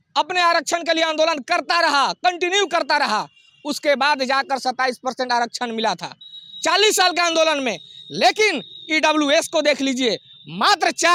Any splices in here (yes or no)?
no